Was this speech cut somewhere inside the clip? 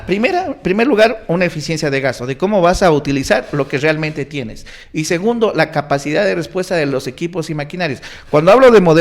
no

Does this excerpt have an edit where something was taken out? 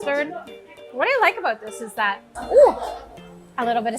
yes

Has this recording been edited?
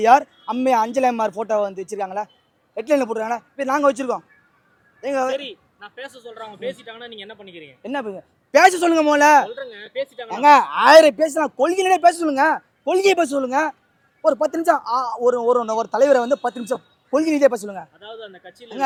no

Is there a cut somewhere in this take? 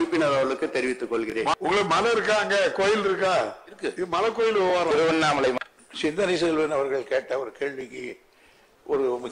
yes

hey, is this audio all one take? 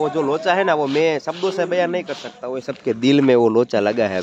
yes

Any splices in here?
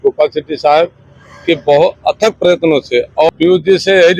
yes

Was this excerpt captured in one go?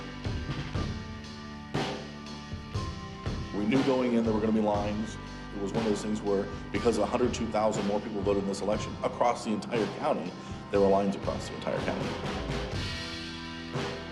yes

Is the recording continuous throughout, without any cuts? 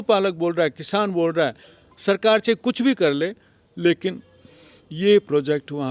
yes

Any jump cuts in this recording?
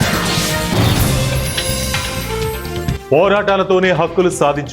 yes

